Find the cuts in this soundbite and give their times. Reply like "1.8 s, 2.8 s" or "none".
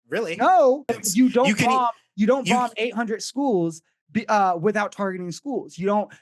0.9 s